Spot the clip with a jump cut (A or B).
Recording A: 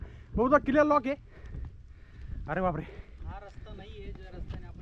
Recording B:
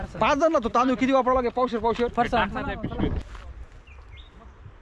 B